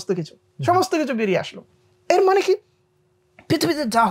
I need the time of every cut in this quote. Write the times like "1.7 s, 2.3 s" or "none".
none